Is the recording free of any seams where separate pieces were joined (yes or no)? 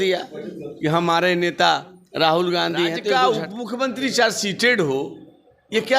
no